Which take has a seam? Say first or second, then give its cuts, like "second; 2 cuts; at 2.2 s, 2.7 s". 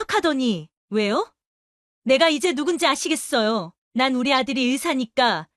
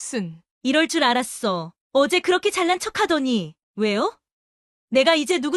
first; 1 cut; at 3.8 s